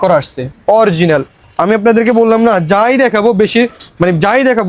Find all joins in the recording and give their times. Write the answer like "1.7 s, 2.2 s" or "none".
none